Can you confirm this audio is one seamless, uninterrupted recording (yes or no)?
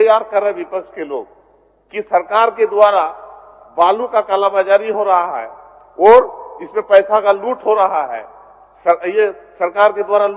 yes